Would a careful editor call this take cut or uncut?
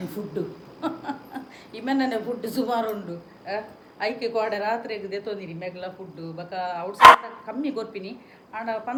uncut